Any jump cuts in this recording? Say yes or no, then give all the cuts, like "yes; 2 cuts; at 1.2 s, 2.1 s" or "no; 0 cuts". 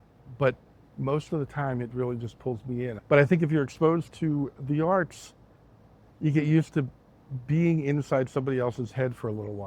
yes; 1 cut; at 2.9 s